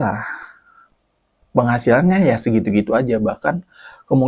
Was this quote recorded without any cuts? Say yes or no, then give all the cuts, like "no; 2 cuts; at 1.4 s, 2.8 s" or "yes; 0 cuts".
yes; 0 cuts